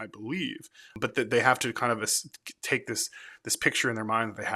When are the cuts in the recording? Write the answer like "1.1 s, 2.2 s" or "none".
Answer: 1.0 s